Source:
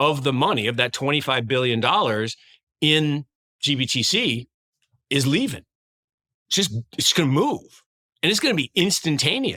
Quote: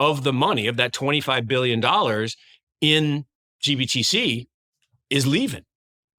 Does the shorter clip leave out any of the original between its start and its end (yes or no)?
no